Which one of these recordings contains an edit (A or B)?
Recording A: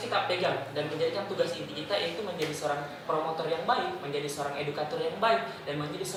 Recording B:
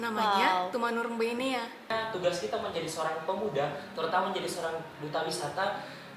B